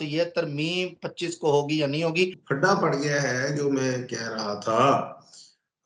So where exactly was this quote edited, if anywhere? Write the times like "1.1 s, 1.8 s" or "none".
2.4 s